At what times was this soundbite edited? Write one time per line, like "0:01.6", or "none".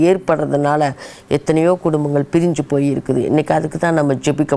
none

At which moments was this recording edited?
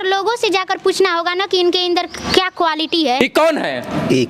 0:03.2

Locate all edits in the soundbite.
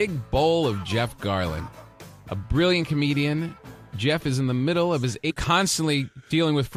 none

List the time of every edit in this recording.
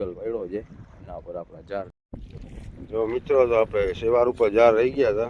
0:02.0

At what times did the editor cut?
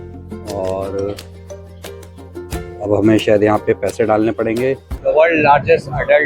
0:04.9

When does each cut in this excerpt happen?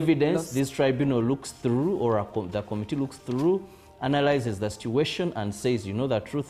none

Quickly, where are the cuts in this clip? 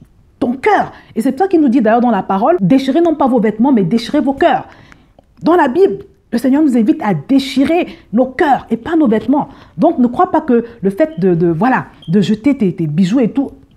none

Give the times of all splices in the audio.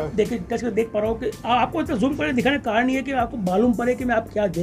none

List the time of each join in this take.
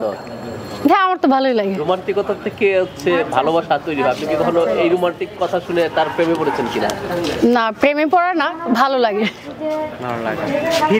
none

